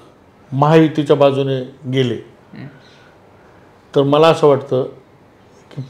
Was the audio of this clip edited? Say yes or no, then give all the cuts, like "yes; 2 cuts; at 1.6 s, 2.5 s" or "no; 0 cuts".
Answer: no; 0 cuts